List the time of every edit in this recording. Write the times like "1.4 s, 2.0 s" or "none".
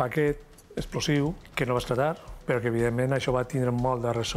1.5 s, 2.4 s